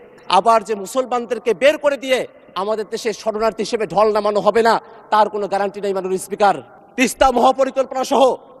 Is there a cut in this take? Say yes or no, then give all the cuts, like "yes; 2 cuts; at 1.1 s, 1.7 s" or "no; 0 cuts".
yes; 1 cut; at 6.7 s